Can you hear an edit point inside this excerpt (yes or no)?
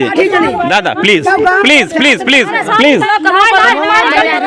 no